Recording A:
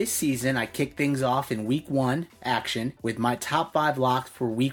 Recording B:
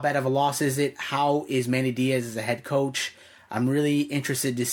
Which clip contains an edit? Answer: A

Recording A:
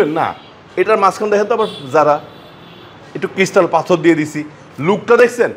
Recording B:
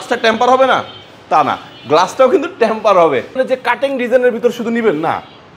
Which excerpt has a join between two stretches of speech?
B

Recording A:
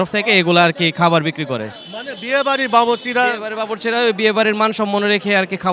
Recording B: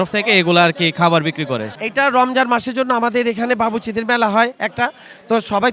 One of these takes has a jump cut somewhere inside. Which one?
B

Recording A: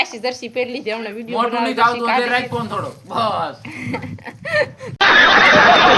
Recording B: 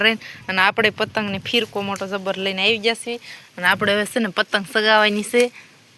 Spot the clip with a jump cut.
A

